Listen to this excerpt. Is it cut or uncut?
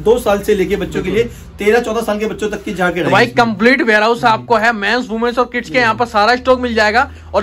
uncut